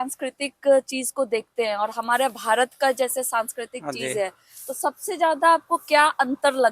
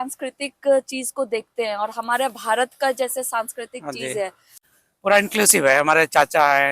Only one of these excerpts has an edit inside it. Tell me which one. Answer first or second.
second